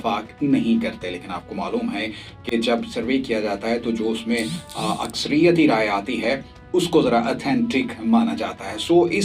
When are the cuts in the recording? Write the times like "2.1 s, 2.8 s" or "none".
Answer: none